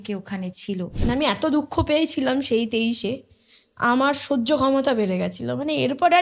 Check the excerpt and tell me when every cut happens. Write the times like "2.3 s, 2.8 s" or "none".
0.9 s